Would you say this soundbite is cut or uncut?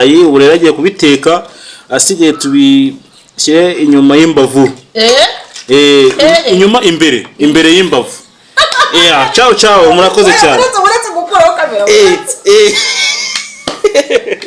uncut